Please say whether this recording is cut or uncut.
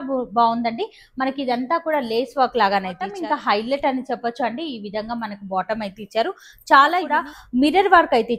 cut